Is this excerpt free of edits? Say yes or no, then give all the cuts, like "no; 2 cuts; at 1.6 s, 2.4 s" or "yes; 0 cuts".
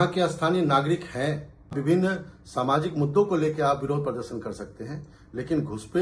no; 1 cut; at 1.7 s